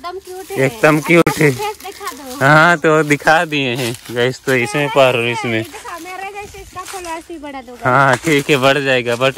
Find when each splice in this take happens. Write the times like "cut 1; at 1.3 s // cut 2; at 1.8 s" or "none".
none

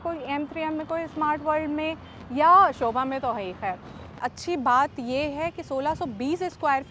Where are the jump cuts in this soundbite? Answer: cut 1; at 4.2 s

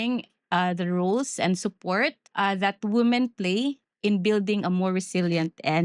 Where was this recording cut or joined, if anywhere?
cut 1; at 2.2 s

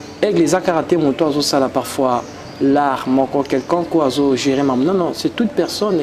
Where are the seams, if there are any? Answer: none

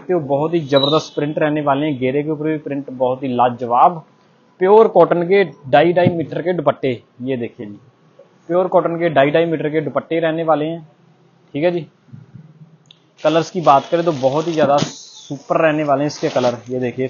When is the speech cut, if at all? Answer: none

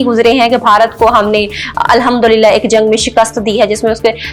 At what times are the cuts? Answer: none

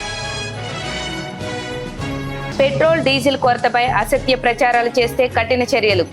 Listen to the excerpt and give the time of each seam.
cut 1; at 1.8 s

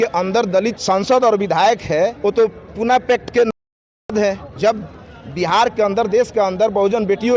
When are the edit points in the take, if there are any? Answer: cut 1; at 0.8 s // cut 2; at 2.2 s // cut 3; at 4.5 s

